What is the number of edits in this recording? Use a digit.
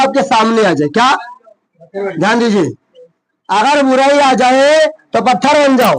0